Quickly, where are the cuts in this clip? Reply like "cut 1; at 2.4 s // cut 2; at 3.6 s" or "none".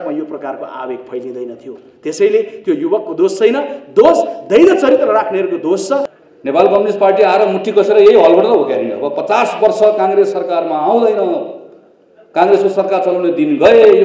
cut 1; at 6.2 s